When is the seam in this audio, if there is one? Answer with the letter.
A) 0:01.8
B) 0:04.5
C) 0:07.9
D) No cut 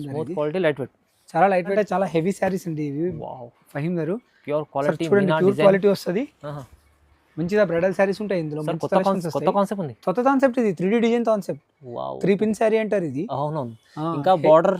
A